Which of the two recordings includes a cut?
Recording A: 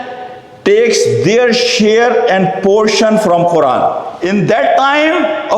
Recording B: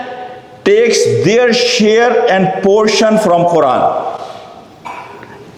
A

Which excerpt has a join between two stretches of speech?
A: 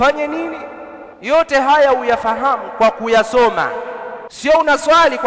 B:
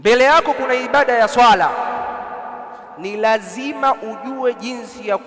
A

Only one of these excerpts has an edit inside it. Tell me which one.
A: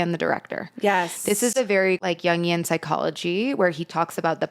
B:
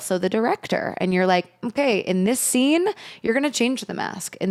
A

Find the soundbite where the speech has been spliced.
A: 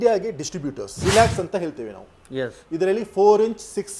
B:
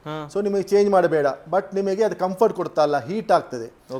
A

